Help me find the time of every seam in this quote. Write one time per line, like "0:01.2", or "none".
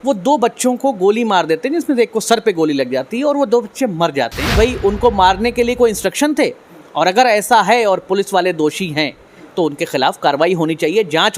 0:04.4